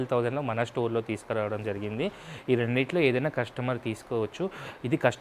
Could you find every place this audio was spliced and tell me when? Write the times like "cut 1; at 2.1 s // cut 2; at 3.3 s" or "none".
none